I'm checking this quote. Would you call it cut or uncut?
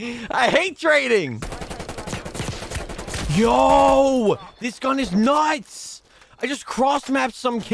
uncut